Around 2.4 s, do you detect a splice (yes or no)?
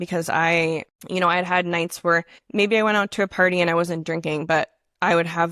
yes